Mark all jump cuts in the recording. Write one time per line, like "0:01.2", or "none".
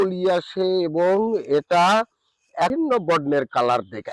0:02.7